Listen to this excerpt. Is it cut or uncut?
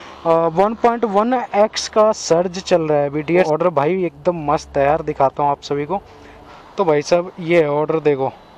cut